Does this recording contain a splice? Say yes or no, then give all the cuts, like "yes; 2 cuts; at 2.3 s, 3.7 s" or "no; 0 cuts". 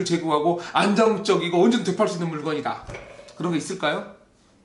no; 0 cuts